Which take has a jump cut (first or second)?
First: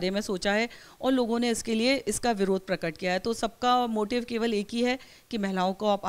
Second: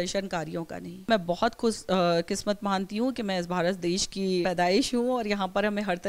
second